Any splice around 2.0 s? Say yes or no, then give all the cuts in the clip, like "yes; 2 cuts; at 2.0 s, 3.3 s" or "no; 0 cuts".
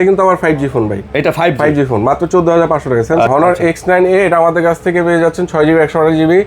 no; 1 cut; at 3.3 s